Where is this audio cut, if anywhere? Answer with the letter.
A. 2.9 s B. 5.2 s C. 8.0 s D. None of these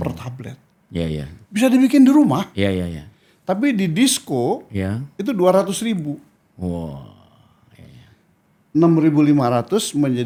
D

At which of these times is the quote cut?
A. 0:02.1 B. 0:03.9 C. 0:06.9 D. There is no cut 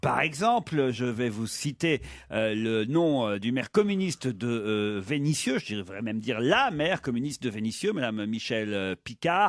C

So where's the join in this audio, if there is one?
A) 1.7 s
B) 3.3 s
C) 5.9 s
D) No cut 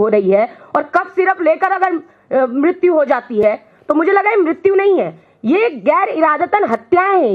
D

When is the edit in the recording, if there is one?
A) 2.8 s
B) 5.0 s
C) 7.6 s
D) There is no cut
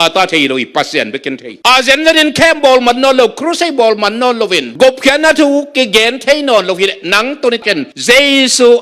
C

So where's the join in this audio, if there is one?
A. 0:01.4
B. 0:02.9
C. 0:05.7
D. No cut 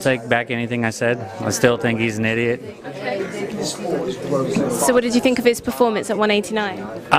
B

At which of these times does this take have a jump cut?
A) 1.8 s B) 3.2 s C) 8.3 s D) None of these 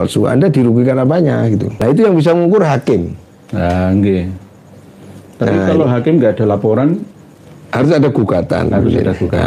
A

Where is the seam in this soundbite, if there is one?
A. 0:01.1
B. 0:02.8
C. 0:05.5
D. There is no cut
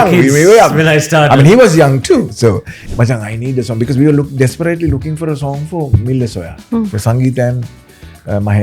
B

